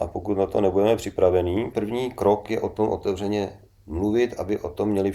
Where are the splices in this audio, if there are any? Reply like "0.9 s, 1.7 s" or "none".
1.7 s